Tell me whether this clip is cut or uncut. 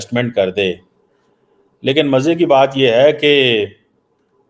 uncut